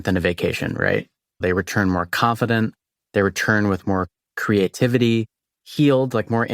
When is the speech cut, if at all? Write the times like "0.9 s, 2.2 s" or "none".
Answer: 1.4 s